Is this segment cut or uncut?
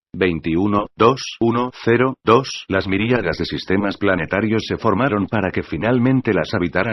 uncut